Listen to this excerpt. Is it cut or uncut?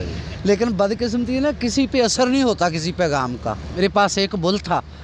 cut